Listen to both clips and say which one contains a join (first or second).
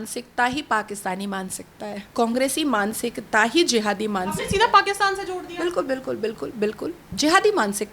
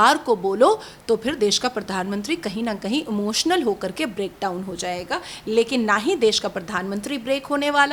first